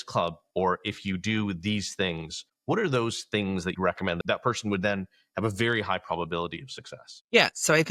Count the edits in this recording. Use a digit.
1